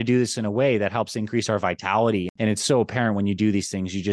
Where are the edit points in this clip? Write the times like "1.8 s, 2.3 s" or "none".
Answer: 2.3 s